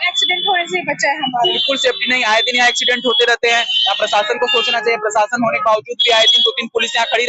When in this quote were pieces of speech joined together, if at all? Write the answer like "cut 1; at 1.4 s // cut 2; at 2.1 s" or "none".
cut 1; at 1.6 s

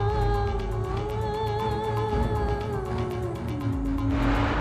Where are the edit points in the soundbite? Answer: none

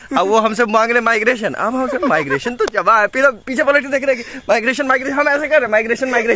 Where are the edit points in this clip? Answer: none

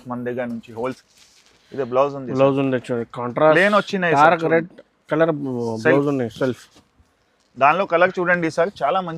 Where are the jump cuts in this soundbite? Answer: cut 1; at 1.0 s

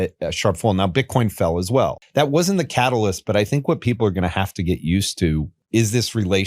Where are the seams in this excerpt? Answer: cut 1; at 2.0 s // cut 2; at 5.6 s

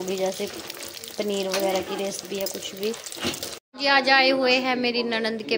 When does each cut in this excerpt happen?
cut 1; at 3.6 s

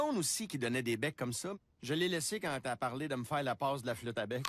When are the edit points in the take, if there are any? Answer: cut 1; at 2.3 s

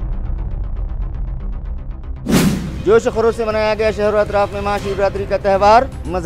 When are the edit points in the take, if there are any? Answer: cut 1; at 2.7 s

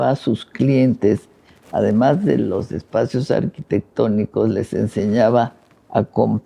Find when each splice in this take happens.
none

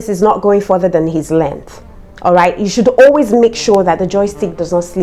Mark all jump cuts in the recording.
none

